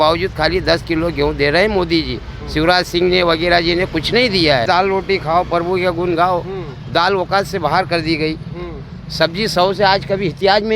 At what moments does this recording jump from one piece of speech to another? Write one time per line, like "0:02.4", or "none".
0:04.7

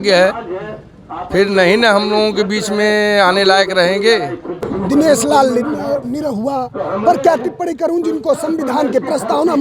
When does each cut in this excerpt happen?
0:04.6

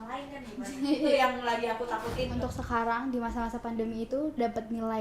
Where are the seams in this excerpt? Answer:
0:02.3

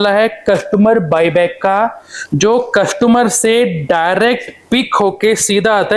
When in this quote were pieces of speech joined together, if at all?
none

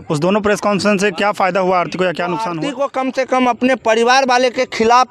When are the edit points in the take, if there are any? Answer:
0:02.6

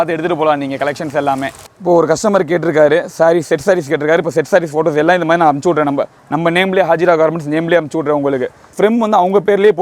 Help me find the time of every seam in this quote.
0:01.7
0:08.6

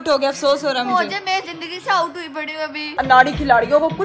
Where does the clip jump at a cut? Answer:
0:02.8

